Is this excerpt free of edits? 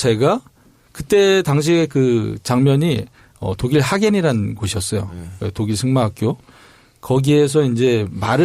yes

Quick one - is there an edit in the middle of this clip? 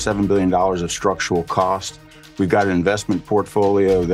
no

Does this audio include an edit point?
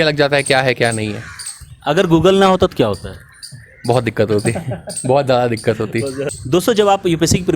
no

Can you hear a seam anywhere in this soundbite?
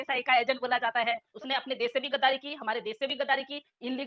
yes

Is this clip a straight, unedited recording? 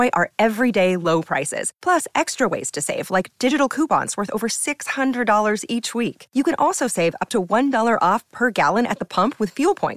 yes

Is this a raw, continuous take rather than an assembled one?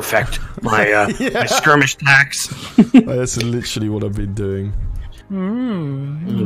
no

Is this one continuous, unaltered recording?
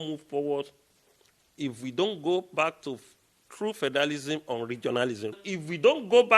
no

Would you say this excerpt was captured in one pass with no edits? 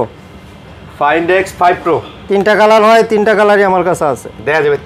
yes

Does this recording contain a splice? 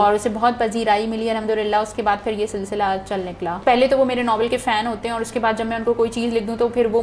yes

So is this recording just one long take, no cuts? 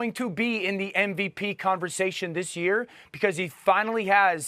yes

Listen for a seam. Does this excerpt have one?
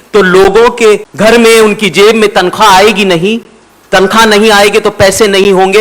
yes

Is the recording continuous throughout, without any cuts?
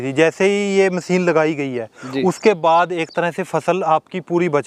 yes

